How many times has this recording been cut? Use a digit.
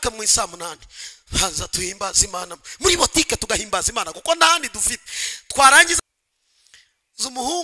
1